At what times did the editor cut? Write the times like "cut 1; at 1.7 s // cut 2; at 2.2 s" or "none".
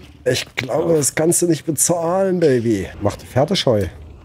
cut 1; at 2.9 s